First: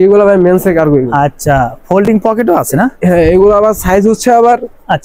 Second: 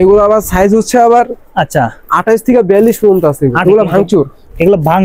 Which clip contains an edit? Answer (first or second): second